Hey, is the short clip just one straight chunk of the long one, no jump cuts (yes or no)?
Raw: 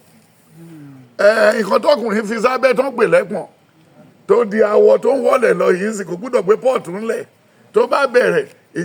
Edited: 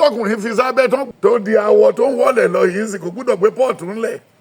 no